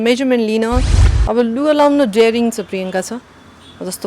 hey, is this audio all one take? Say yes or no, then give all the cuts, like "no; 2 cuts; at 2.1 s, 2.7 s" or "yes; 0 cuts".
no; 1 cut; at 1.0 s